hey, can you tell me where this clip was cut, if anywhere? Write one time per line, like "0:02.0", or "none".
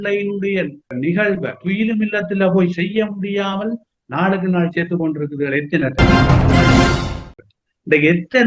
0:01.6
0:05.9
0:07.2